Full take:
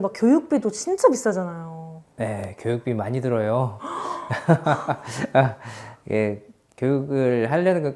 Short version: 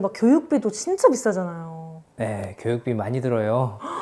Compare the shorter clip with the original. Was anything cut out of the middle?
no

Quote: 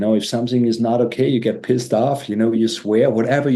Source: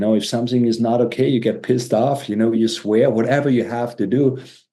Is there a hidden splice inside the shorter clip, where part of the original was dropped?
no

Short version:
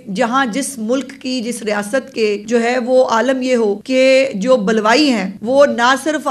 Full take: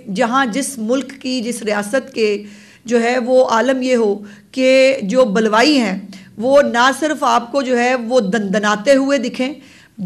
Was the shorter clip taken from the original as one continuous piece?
no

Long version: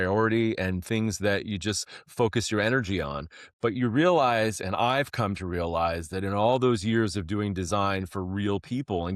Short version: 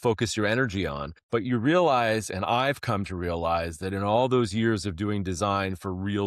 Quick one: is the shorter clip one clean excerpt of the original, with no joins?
no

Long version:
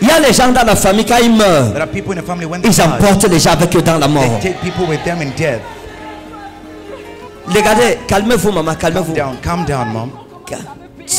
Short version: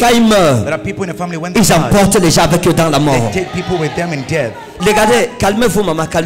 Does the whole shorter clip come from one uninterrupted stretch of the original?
no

